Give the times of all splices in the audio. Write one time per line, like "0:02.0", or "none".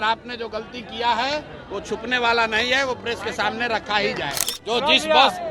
0:04.4